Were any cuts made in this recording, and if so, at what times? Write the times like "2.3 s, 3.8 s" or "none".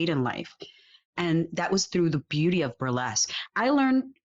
3.3 s